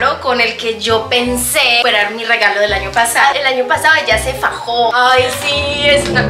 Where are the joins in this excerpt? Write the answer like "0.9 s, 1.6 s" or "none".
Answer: 3.3 s, 4.9 s